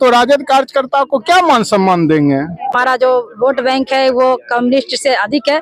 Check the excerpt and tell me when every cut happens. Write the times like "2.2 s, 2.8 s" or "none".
2.7 s